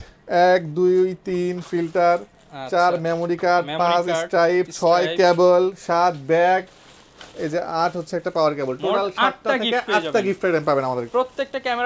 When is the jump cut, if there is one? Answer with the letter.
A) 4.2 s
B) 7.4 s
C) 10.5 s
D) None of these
D